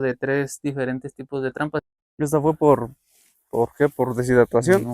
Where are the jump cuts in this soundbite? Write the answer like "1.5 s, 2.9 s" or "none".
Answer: 1.8 s